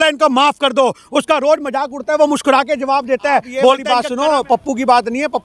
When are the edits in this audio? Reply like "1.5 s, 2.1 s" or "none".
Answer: 3.8 s